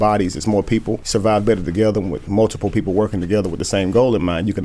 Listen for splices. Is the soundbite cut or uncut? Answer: cut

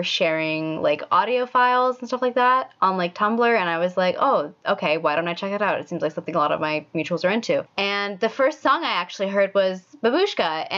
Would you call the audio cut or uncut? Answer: cut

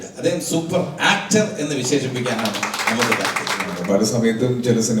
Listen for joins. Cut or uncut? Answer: cut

